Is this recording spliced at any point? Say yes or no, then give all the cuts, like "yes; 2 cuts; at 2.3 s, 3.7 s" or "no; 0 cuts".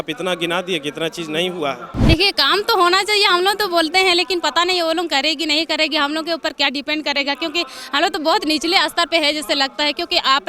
yes; 1 cut; at 1.9 s